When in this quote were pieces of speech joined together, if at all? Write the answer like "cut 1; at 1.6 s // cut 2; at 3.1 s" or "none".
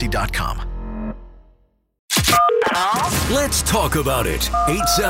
cut 1; at 2.1 s